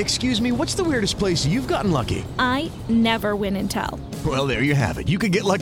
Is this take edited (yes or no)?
no